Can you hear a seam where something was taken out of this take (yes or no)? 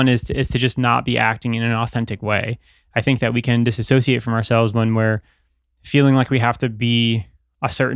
no